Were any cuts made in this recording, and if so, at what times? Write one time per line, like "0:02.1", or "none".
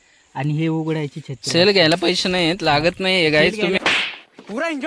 0:03.8

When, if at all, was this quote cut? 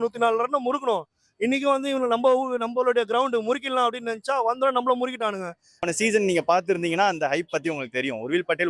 0:05.9

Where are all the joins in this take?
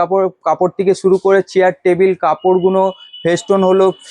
none

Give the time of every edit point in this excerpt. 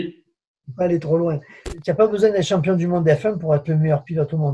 0:01.7

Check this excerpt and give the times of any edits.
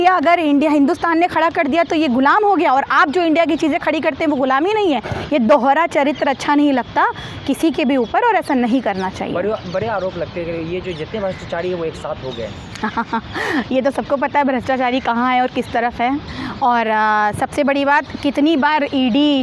none

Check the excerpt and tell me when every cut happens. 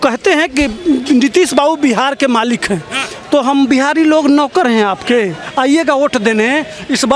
0:05.4

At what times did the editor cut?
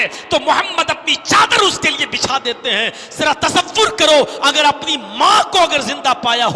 none

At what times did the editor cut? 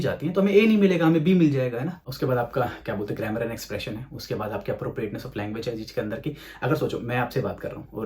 0:02.0

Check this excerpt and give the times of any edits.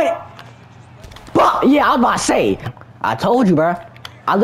0:02.6

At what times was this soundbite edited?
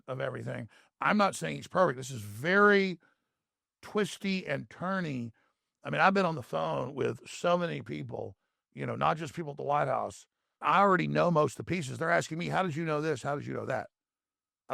0:10.5

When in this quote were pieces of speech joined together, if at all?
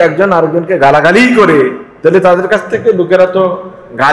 0:01.8

